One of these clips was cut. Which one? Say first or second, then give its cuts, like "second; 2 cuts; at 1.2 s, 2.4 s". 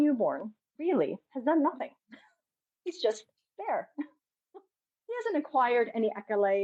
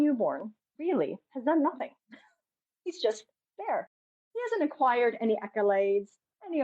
second; 1 cut; at 3.9 s